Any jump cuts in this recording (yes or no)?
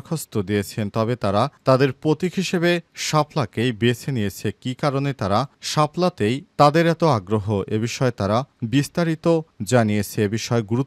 no